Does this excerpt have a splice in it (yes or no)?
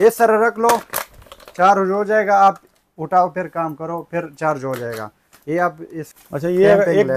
yes